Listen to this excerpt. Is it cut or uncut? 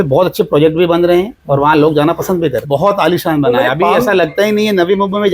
cut